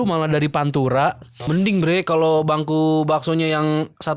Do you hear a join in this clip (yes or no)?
yes